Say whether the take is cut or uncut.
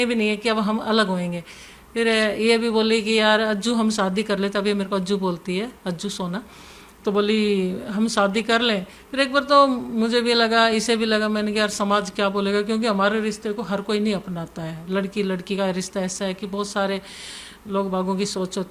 uncut